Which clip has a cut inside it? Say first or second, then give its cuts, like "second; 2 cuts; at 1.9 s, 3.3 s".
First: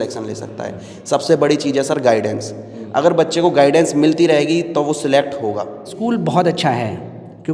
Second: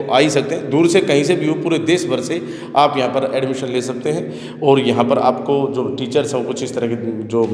first; 1 cut; at 5.9 s